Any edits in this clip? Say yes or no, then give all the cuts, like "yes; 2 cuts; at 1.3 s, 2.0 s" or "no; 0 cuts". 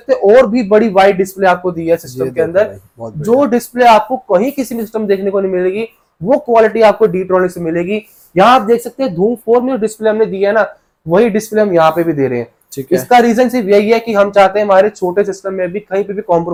no; 0 cuts